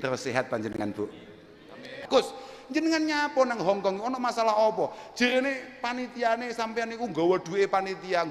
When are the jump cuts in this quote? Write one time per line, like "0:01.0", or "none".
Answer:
0:02.0